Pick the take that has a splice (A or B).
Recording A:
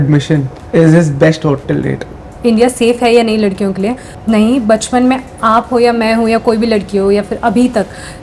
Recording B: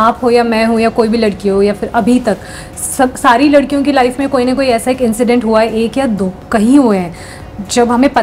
A